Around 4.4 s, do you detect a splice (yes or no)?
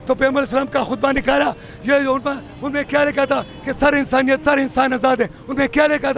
yes